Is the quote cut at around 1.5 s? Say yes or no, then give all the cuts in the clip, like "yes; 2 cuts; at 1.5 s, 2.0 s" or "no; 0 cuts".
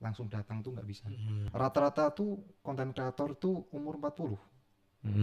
yes; 1 cut; at 1.5 s